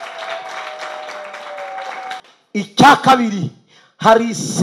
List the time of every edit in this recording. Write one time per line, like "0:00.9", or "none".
0:02.2

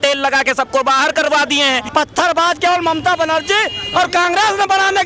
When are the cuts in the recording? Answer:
0:01.8

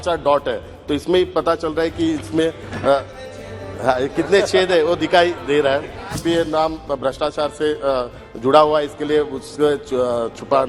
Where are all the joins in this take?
0:06.2

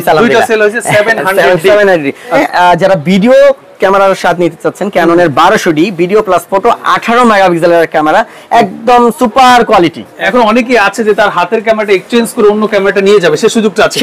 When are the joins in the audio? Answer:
0:02.4
0:10.2

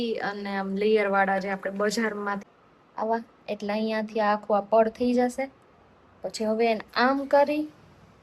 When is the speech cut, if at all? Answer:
0:02.4

